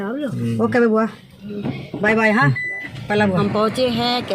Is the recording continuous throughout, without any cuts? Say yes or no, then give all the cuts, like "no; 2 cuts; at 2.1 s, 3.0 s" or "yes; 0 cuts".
no; 1 cut; at 3.4 s